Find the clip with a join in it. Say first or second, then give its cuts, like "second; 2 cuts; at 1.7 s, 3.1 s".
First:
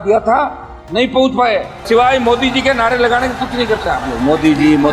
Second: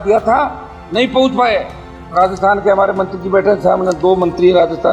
first; 1 cut; at 1.8 s